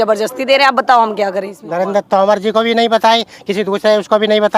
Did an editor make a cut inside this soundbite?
yes; 1 cut; at 1.6 s

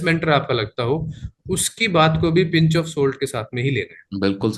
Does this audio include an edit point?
no; 0 cuts

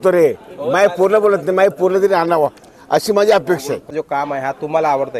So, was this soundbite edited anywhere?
yes; 1 cut; at 3.9 s

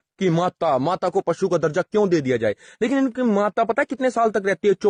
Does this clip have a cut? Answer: no; 0 cuts

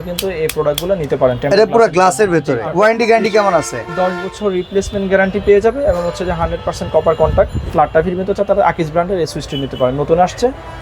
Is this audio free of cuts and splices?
no; 2 cuts; at 2.7 s, 7.6 s

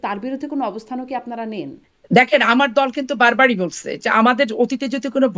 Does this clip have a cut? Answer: no; 0 cuts

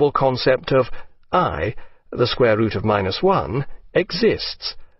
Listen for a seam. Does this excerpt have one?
yes; 1 cut; at 3.3 s

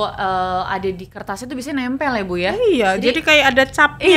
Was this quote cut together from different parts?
no; 0 cuts

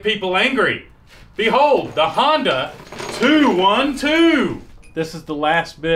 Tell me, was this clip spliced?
yes; 1 cut; at 4.9 s

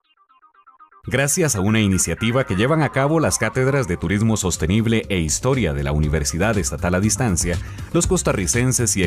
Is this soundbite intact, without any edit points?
yes; 0 cuts

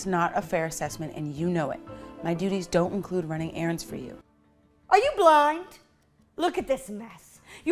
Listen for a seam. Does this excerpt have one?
yes; 1 cut; at 4.3 s

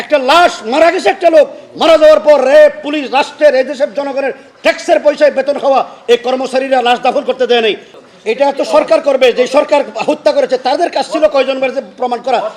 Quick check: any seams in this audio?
yes; 1 cut; at 7.9 s

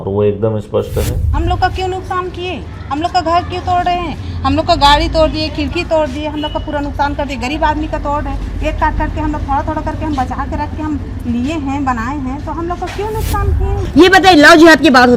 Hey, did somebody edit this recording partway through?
yes; 2 cuts; at 1.3 s, 13.8 s

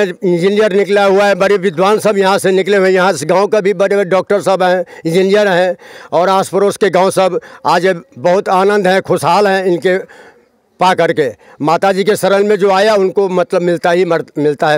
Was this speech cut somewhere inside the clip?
no; 0 cuts

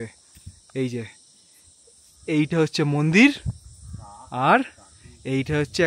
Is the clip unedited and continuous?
yes; 0 cuts

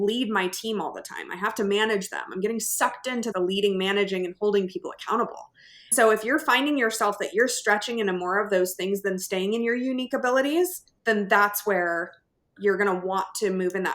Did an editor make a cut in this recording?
yes; 3 cuts; at 3.3 s, 5.9 s, 10.9 s

